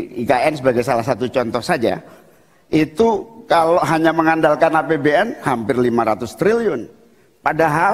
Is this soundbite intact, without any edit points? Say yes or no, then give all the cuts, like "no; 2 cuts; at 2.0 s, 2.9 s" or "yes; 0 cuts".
yes; 0 cuts